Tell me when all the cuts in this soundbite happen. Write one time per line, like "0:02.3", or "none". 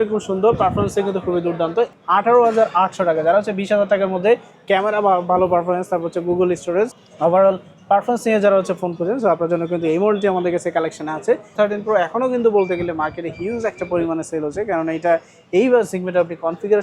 0:01.9
0:07.0
0:11.5